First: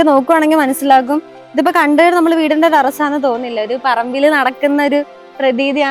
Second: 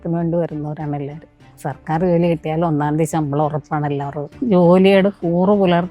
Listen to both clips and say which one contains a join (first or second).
second